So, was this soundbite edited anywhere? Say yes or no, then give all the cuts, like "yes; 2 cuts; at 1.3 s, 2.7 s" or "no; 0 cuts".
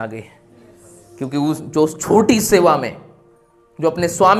no; 0 cuts